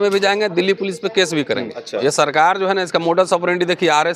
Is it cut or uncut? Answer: cut